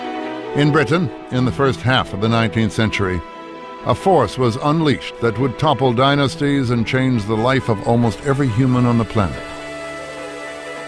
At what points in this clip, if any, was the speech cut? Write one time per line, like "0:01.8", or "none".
0:01.1